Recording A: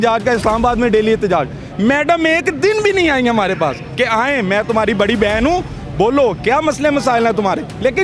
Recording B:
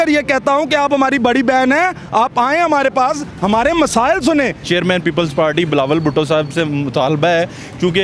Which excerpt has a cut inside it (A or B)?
B